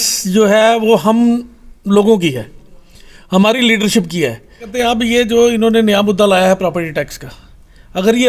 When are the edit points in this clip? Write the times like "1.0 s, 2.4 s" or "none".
4.7 s